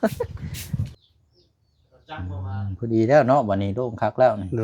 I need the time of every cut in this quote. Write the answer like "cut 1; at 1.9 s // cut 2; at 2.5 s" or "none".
cut 1; at 0.9 s